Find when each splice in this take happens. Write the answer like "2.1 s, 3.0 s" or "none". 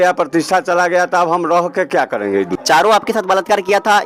2.6 s